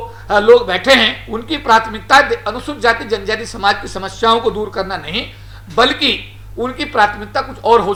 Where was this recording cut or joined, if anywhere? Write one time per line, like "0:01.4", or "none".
none